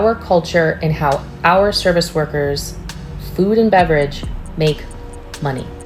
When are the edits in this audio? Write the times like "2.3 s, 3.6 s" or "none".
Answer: none